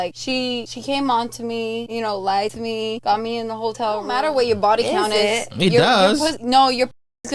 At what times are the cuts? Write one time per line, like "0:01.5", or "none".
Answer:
0:04.1